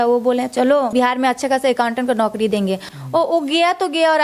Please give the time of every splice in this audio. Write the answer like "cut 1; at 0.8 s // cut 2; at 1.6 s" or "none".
cut 1; at 0.9 s // cut 2; at 2.9 s